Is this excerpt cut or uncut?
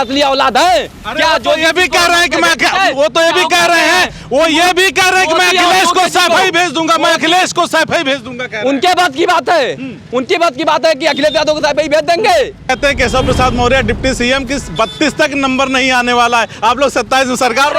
cut